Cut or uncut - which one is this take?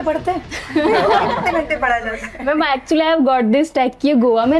uncut